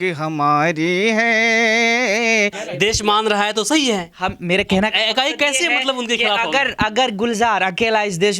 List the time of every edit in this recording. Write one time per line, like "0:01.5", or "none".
0:02.6